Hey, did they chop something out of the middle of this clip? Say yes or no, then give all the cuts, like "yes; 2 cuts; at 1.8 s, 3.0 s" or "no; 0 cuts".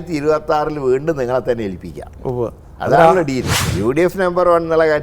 yes; 1 cut; at 3.6 s